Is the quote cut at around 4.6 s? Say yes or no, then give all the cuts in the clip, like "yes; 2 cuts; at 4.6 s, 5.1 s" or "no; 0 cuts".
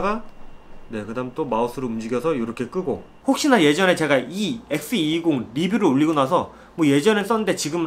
no; 1 cut; at 3.1 s